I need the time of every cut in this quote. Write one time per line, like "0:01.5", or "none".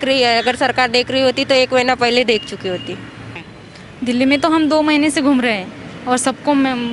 0:03.3